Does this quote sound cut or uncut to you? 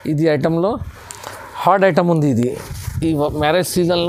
uncut